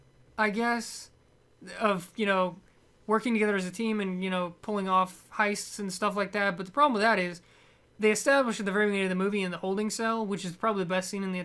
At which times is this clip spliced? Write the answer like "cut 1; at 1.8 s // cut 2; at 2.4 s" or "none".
none